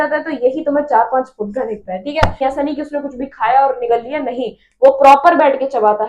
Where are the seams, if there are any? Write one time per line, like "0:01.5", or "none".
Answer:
0:02.4